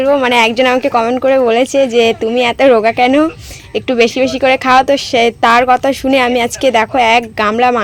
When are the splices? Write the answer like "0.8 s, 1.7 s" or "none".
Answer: none